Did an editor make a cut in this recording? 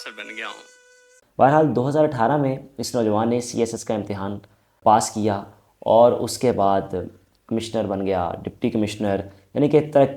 yes; 2 cuts; at 1.2 s, 4.8 s

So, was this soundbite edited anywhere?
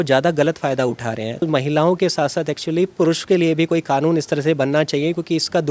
yes; 1 cut; at 1.4 s

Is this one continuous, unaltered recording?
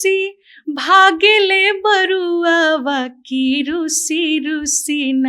yes; 0 cuts

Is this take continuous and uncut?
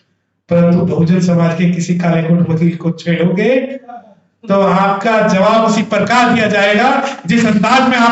yes; 0 cuts

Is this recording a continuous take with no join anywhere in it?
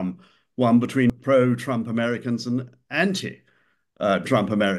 no; 1 cut; at 1.2 s

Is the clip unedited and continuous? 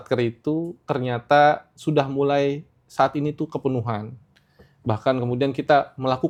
yes; 0 cuts

